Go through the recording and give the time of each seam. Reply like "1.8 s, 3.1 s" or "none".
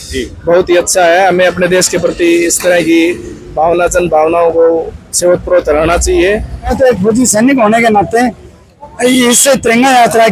6.7 s